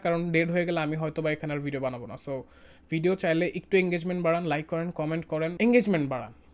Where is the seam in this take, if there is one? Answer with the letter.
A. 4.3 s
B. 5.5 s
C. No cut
B